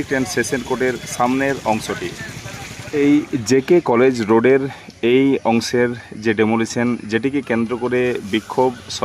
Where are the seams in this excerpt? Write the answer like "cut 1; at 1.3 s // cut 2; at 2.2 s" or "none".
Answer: cut 1; at 2.9 s

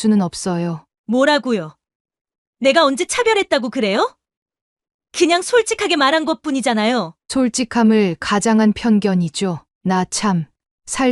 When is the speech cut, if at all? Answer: none

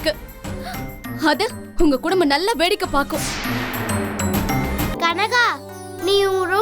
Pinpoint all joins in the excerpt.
cut 1; at 4.9 s

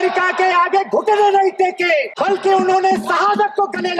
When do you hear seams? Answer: cut 1; at 2.1 s

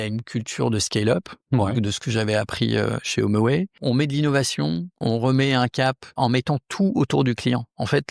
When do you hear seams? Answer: cut 1; at 3.8 s // cut 2; at 5.0 s // cut 3; at 6.1 s

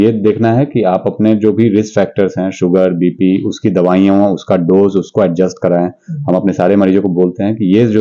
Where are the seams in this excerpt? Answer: none

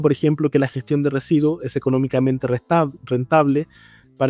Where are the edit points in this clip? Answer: none

